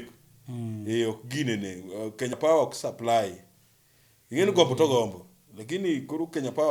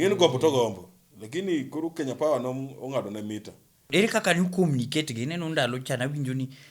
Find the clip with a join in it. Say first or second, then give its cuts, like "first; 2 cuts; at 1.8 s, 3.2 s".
second; 1 cut; at 3.9 s